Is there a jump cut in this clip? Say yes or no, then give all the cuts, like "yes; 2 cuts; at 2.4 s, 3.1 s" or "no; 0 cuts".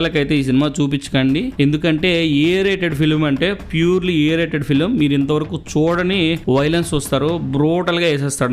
no; 0 cuts